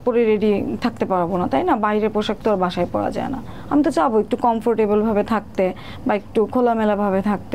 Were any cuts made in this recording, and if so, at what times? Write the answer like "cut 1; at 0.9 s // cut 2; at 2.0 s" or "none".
none